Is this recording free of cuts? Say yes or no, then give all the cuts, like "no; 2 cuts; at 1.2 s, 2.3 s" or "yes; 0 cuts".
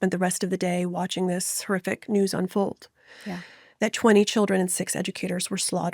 yes; 0 cuts